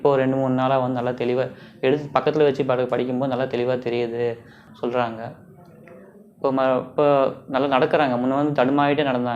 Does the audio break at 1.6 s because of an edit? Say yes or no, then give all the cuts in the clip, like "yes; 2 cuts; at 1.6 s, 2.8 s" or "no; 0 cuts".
no; 1 cut; at 4.6 s